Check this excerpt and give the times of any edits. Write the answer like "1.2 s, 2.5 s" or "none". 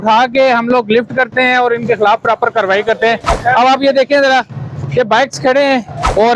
none